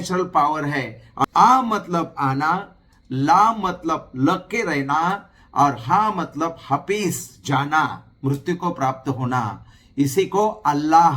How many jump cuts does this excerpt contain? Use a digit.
1